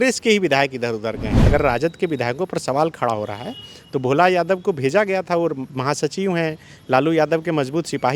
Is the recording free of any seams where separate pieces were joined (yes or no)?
no